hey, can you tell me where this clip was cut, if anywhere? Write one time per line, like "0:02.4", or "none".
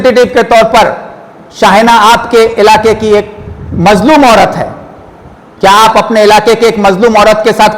none